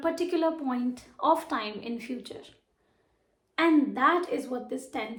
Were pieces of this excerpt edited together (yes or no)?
no